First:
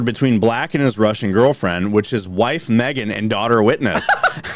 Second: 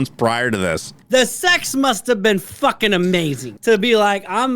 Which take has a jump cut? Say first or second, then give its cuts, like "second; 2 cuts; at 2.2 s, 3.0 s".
second; 2 cuts; at 1.0 s, 3.5 s